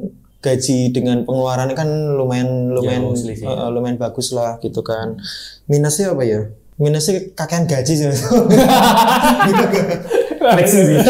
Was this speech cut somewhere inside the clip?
yes; 1 cut; at 6.6 s

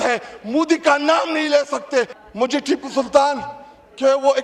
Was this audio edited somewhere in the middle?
yes; 1 cut; at 2.2 s

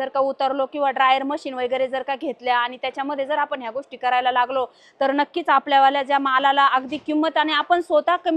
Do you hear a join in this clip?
no; 0 cuts

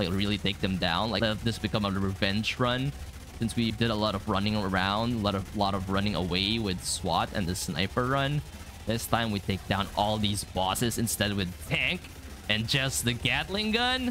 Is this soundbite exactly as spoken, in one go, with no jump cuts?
no; 2 cuts; at 1.2 s, 3.7 s

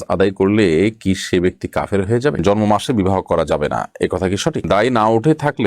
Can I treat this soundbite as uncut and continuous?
no; 2 cuts; at 2.4 s, 4.6 s

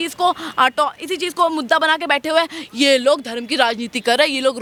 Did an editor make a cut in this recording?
no; 0 cuts

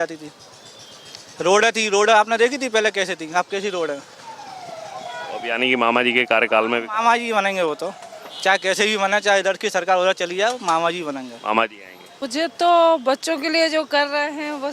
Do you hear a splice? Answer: yes; 1 cut; at 12.2 s

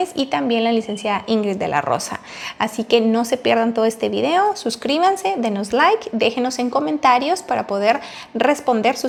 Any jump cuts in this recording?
no; 0 cuts

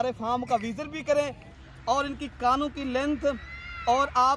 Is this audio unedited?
no; 1 cut; at 1.5 s

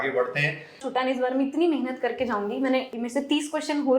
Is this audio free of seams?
no; 2 cuts; at 0.8 s, 2.9 s

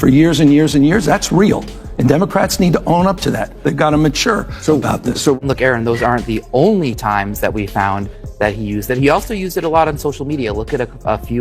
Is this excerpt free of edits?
no; 1 cut; at 5.4 s

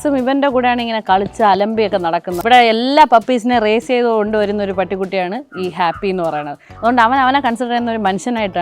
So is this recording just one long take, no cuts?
no; 1 cut; at 2.3 s

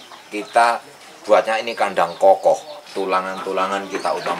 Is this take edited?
no; 0 cuts

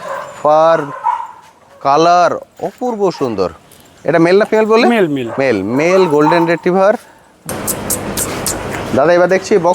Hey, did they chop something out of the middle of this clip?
yes; 1 cut; at 7.3 s

